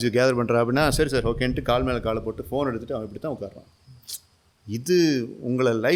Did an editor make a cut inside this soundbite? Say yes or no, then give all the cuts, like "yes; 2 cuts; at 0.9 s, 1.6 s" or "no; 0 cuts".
no; 0 cuts